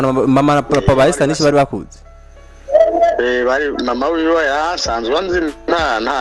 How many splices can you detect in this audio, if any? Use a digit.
0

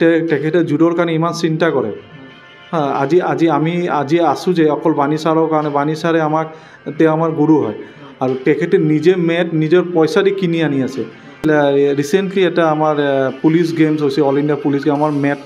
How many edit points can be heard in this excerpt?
1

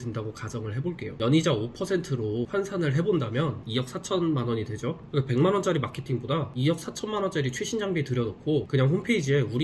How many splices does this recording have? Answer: 3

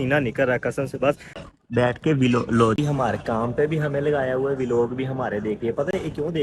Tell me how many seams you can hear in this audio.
2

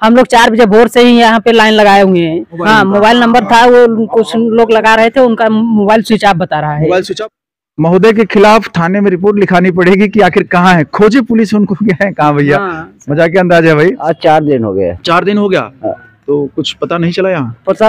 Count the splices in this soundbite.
3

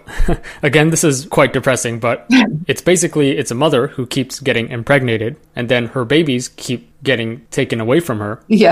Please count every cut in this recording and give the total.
1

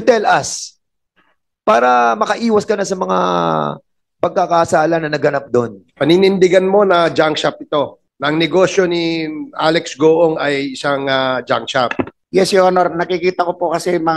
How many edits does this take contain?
3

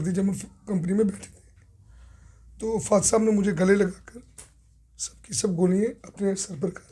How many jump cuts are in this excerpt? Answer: 0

